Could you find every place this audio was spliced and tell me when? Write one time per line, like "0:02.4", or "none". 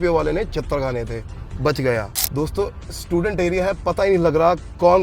0:02.2